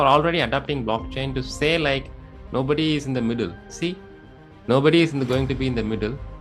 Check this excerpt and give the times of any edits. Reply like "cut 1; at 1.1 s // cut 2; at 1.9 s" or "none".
none